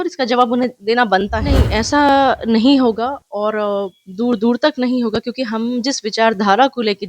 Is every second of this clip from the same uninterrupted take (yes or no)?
no